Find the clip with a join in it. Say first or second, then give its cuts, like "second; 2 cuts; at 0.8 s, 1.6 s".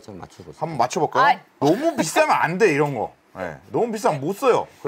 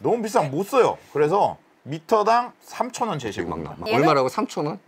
second; 1 cut; at 3.8 s